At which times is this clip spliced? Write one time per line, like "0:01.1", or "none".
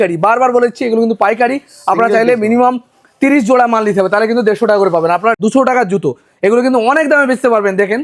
0:05.4